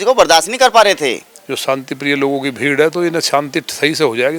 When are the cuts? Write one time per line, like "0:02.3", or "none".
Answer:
0:01.3